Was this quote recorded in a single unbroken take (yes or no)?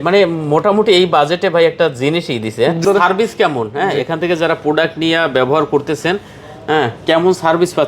no